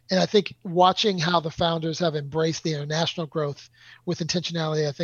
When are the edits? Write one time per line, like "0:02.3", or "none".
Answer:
none